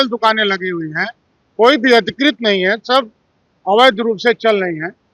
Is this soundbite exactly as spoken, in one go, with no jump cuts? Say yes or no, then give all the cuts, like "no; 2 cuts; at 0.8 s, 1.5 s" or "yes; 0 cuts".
yes; 0 cuts